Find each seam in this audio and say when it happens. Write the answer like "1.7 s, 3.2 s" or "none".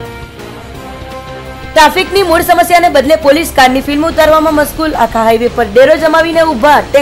none